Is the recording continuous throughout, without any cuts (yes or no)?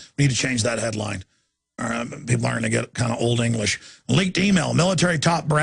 no